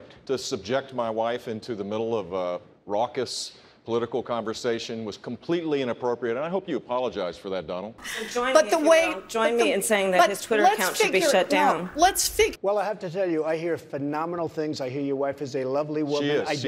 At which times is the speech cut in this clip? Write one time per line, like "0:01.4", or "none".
0:08.0
0:12.5

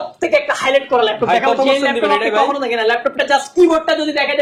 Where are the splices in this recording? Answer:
none

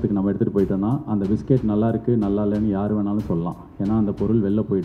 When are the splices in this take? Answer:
none

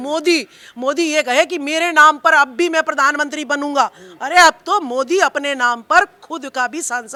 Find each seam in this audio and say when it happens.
none

